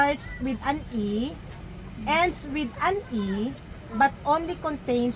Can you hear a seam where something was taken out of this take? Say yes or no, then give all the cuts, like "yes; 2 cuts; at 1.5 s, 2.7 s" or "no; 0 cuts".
no; 0 cuts